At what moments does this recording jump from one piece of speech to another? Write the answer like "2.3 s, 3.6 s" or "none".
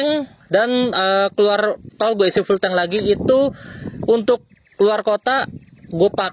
none